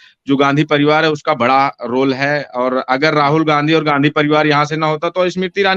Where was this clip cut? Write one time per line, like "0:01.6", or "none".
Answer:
none